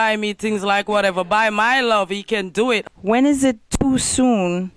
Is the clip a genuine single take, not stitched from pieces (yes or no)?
no